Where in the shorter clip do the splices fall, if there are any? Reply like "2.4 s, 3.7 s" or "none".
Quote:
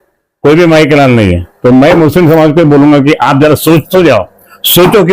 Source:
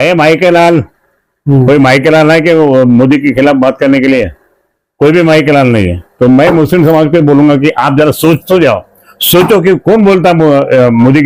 none